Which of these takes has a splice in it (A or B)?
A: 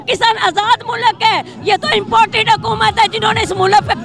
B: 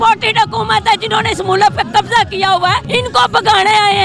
B